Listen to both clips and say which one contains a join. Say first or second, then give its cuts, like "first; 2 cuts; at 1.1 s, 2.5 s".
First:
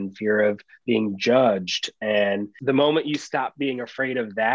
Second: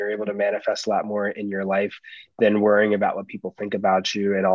first; 1 cut; at 2.5 s